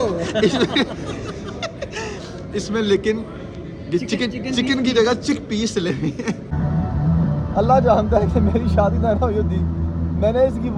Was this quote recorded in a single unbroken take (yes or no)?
no